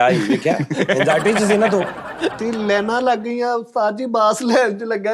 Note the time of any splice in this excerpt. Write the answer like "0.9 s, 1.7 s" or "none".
2.4 s